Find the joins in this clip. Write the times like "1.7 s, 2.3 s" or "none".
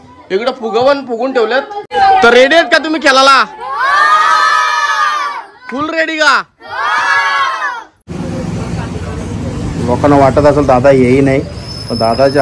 1.8 s, 8.0 s